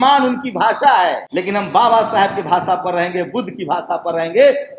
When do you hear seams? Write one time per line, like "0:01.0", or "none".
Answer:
0:01.3